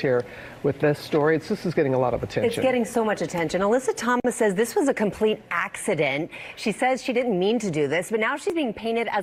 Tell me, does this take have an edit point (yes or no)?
no